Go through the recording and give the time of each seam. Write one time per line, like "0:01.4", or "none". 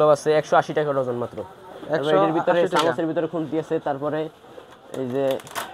none